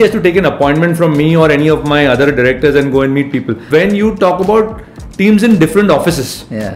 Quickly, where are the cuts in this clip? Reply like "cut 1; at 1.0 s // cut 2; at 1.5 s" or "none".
cut 1; at 3.6 s